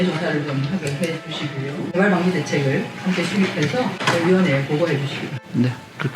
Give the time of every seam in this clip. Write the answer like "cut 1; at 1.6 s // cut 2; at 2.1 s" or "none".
cut 1; at 1.8 s

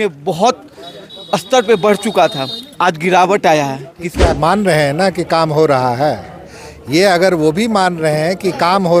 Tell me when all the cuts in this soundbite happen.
cut 1; at 4.2 s

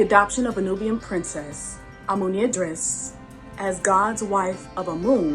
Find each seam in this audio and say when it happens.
none

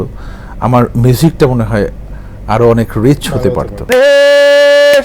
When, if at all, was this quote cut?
cut 1; at 3.9 s

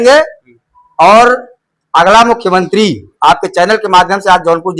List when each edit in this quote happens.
none

